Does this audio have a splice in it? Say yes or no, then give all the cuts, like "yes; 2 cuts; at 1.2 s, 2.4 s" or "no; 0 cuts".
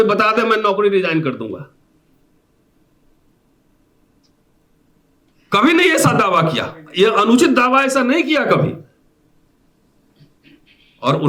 no; 0 cuts